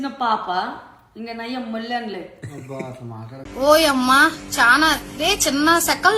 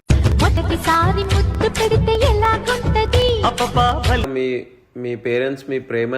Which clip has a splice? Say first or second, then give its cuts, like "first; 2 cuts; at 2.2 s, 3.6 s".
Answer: second; 1 cut; at 4.2 s